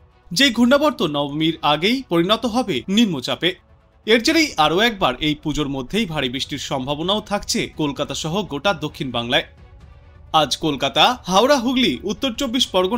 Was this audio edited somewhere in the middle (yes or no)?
no